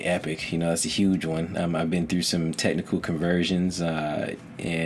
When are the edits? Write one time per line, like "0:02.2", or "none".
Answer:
none